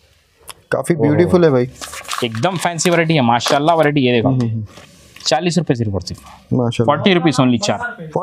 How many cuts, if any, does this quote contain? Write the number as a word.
zero